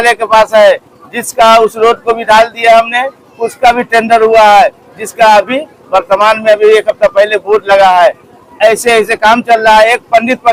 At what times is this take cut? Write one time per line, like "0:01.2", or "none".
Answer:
none